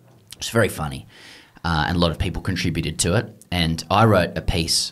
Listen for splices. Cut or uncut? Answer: uncut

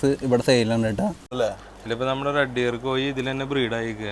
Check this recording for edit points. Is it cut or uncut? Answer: cut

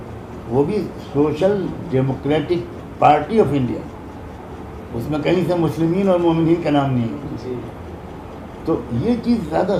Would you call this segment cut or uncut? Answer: uncut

